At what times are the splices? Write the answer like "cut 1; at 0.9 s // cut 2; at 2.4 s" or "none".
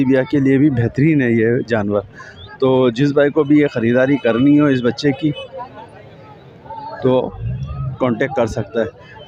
none

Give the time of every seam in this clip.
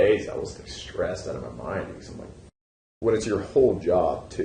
cut 1; at 2.8 s

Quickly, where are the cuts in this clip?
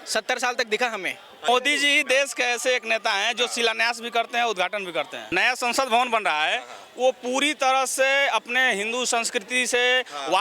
cut 1; at 1.5 s // cut 2; at 5.3 s

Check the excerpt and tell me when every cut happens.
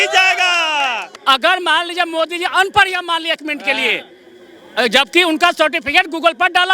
cut 1; at 1.1 s

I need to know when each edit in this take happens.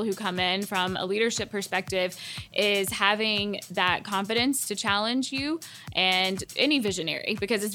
cut 1; at 6.4 s

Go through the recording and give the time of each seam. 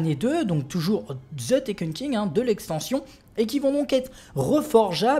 cut 1; at 1.9 s

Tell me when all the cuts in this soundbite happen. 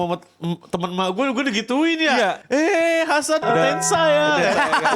cut 1; at 2.4 s // cut 2; at 3.4 s

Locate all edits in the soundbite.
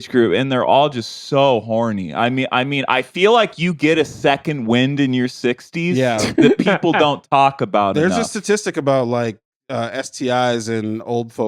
none

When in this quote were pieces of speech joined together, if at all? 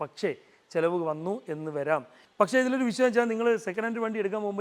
cut 1; at 2.2 s

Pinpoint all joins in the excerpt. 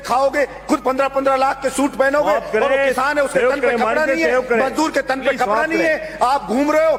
none

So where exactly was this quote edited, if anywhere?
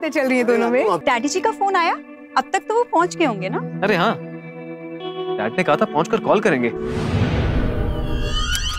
cut 1; at 1.0 s // cut 2; at 6.9 s

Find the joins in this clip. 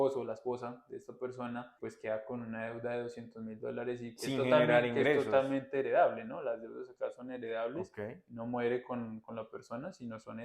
cut 1; at 1.8 s

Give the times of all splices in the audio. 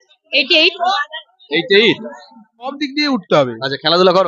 cut 1; at 2.7 s

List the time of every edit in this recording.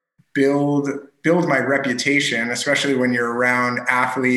none

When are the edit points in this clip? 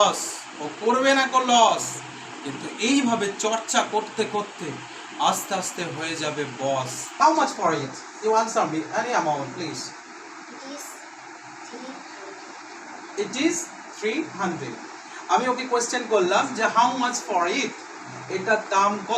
cut 1; at 7.1 s

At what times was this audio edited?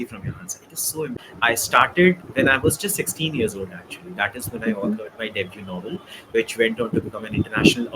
cut 1; at 1.2 s

